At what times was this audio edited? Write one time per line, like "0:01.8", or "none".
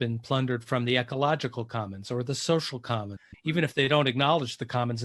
0:03.2